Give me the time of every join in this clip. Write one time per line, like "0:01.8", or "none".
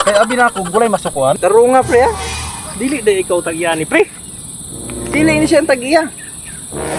0:01.3